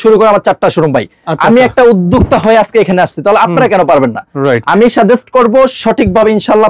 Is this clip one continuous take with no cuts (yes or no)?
yes